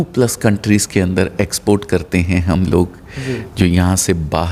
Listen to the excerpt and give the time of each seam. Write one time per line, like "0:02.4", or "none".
none

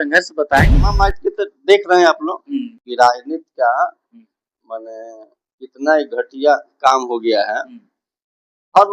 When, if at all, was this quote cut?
0:00.9

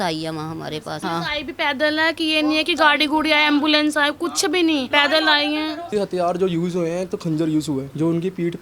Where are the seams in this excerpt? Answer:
0:01.0
0:04.9
0:05.9

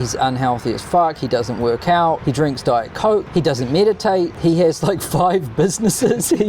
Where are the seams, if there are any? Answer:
0:02.2
0:03.3
0:04.3

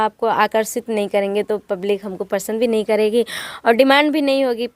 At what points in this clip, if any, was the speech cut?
none

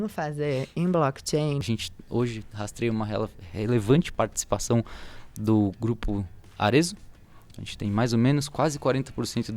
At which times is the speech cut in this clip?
0:01.6
0:04.1

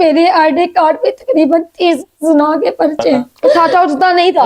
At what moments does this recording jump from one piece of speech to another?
0:03.6

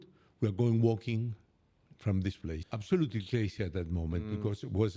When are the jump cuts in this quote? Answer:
0:02.6

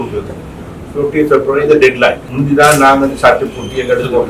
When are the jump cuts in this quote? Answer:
0:02.3

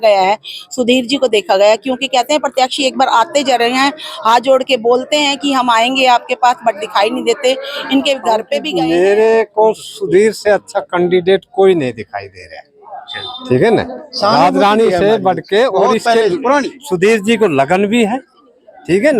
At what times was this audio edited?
0:08.6

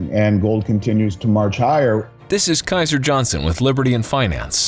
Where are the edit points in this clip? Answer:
0:02.1

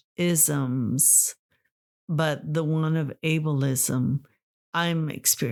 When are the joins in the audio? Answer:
none

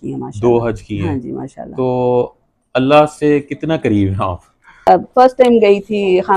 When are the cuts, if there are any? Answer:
0:04.9

